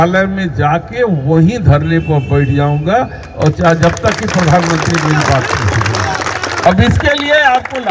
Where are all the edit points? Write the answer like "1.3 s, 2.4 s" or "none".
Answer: 6.7 s